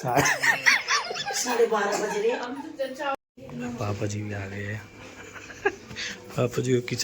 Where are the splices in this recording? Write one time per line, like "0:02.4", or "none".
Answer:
0:03.2